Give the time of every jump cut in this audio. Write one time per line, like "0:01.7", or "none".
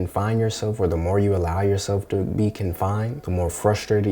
0:03.2